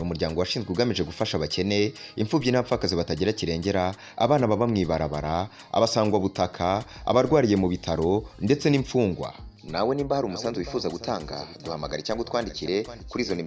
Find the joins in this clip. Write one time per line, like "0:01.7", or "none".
none